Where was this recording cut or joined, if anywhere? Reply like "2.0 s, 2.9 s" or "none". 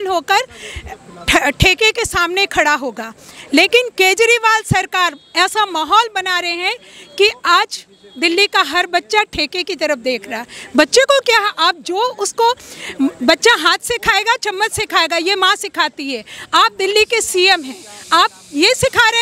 none